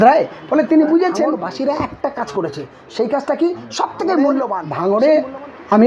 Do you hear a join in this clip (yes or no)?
yes